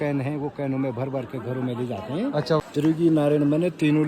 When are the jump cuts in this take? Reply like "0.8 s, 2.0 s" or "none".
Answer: 2.6 s